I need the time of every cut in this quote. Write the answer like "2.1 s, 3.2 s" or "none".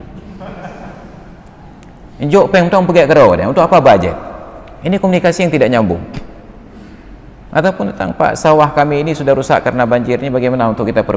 none